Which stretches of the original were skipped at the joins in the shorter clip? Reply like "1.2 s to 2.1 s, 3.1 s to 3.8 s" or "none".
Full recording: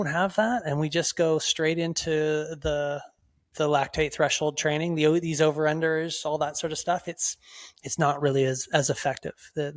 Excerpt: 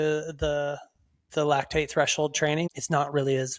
4.9 s to 7.8 s